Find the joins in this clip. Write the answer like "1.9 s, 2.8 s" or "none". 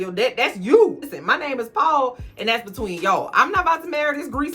1.0 s

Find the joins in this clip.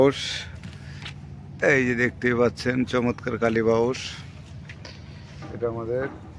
none

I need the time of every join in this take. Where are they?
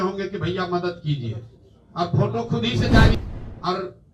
3.2 s

